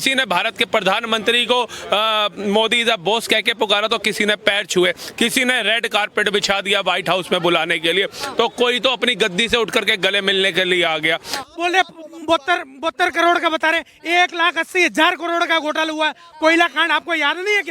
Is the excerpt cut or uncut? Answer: cut